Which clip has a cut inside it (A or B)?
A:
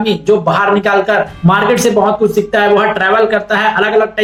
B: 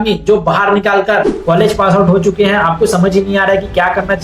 B